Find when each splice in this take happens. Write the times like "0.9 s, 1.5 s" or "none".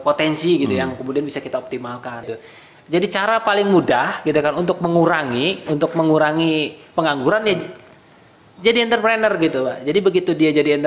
2.3 s